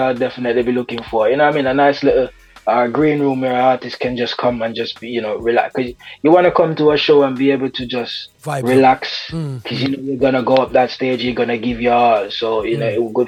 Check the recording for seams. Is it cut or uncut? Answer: uncut